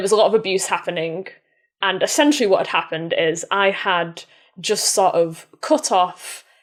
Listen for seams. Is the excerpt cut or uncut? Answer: uncut